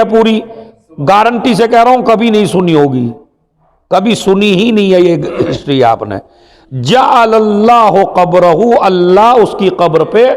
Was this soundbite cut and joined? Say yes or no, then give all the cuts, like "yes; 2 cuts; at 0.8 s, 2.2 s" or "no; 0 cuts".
no; 0 cuts